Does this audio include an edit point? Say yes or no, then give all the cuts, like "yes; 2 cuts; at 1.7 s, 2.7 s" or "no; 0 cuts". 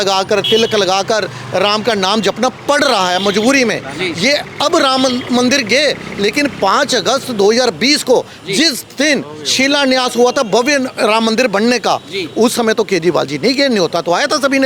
no; 0 cuts